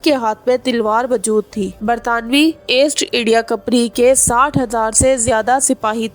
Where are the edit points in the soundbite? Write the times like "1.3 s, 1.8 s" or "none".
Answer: 1.8 s